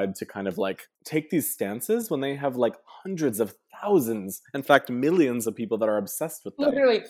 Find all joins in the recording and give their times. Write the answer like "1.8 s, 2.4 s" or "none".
0.9 s